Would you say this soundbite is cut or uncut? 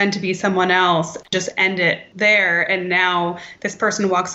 cut